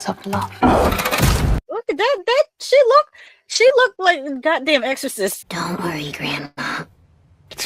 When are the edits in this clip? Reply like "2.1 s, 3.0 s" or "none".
5.4 s, 6.5 s